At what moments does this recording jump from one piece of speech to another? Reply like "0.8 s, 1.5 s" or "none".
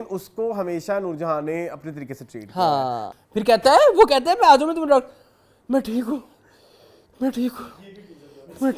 3.1 s